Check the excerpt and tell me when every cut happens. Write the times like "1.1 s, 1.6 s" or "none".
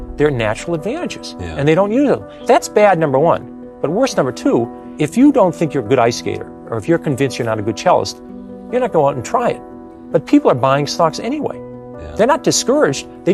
2.3 s, 4.8 s